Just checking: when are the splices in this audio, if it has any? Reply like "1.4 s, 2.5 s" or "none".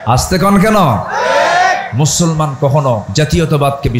3.1 s